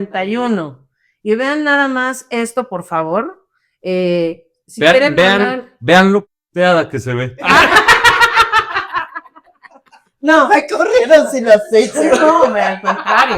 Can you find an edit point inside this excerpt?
no; 0 cuts

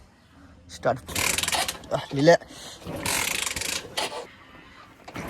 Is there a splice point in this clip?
yes; 2 cuts; at 1.0 s, 4.2 s

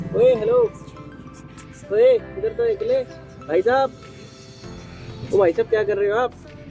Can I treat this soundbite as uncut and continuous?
yes; 0 cuts

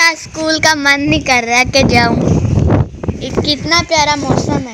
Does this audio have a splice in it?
no; 0 cuts

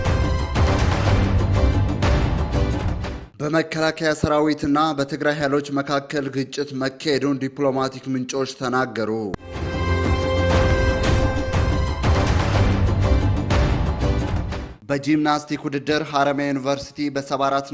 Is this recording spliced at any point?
yes; 2 cuts; at 9.3 s, 14.2 s

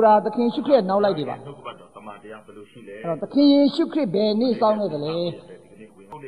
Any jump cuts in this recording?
yes; 2 cuts; at 1.4 s, 2.9 s

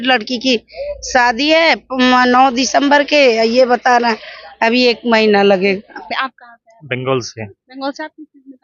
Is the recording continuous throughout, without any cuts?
no; 1 cut; at 6.1 s

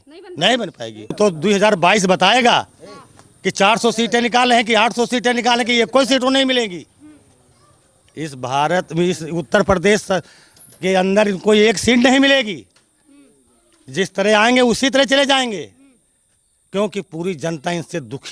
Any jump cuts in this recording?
yes; 1 cut; at 1.1 s

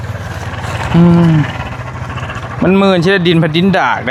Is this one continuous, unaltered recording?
yes; 0 cuts

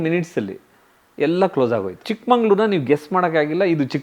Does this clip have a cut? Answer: yes; 1 cut; at 2.1 s

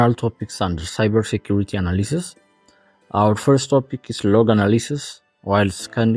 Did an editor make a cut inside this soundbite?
no; 0 cuts

